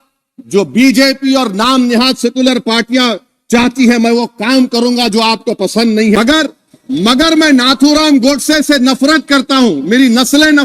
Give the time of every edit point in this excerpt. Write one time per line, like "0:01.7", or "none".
0:06.2